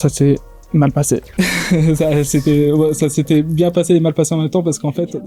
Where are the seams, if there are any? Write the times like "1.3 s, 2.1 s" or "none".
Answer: none

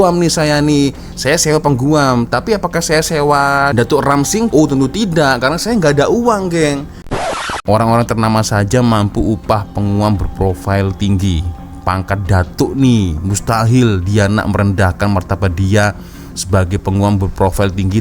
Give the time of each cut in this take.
7.2 s

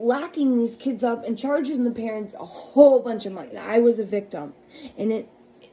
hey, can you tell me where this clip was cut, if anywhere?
3.5 s

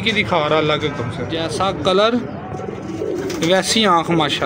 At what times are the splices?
1.4 s

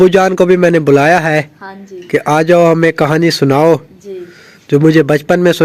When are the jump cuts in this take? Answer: none

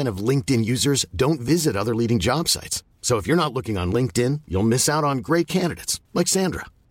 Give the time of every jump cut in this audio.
none

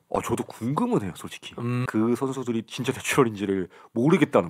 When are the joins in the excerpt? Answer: 1.9 s

